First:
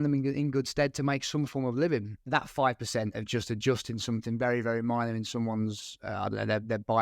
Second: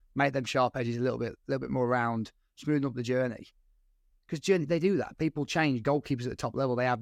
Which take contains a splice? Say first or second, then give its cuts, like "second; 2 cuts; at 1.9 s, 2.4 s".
first; 1 cut; at 2.1 s